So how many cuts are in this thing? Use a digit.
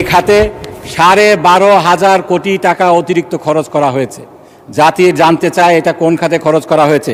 0